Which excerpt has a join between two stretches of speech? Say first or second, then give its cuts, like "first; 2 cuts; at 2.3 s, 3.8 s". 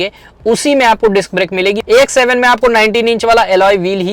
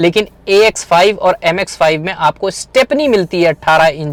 first; 1 cut; at 1.8 s